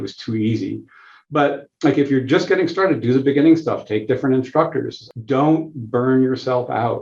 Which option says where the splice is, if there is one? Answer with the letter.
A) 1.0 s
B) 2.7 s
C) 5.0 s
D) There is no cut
C